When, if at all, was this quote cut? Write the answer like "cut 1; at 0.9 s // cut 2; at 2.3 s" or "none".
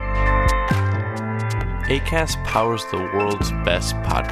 cut 1; at 1.2 s